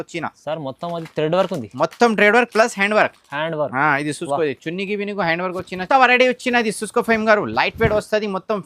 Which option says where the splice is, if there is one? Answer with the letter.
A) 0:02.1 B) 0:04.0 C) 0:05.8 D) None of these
C